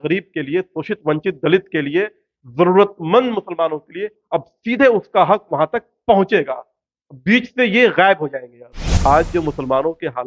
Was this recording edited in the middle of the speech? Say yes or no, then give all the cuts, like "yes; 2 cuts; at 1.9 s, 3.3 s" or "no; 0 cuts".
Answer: yes; 1 cut; at 9.1 s